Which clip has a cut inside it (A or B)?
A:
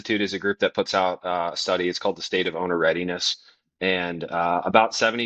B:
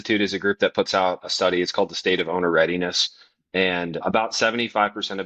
B